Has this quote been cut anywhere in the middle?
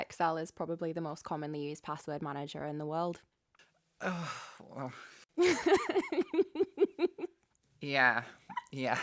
no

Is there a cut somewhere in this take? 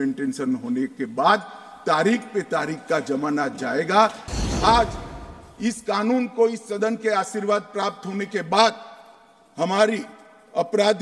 yes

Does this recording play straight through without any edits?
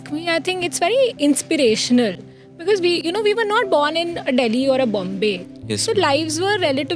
yes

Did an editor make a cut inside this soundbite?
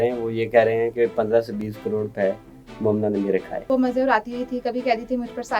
yes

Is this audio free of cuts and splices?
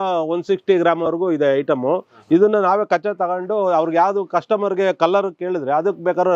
yes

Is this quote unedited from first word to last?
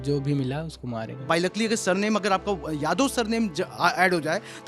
no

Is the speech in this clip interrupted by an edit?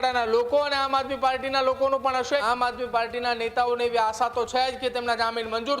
yes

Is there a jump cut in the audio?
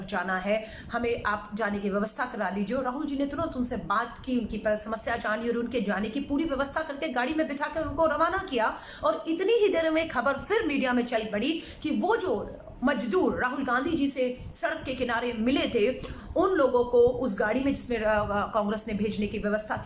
no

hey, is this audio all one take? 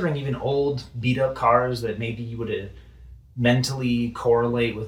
yes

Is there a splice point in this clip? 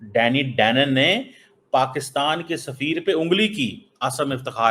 no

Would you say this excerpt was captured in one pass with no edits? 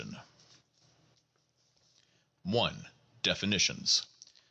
yes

